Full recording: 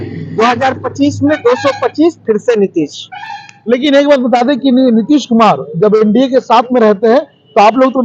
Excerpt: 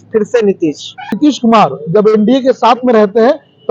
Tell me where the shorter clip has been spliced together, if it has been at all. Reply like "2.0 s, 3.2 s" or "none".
1.2 s